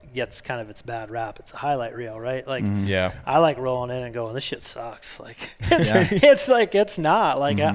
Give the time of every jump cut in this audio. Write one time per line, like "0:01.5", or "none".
none